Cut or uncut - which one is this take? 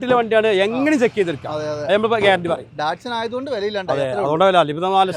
uncut